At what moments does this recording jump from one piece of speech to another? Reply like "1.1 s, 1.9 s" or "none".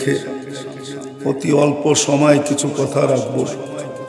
none